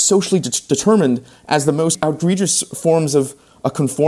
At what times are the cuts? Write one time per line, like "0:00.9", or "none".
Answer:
0:02.0